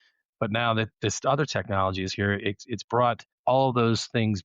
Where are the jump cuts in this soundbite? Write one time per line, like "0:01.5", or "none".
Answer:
0:03.3